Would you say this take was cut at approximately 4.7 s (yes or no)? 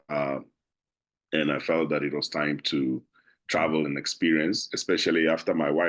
no